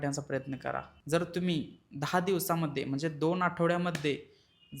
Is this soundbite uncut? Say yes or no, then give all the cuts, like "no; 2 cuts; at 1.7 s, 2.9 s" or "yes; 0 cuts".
no; 1 cut; at 0.9 s